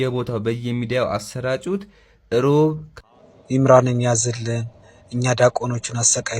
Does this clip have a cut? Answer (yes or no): yes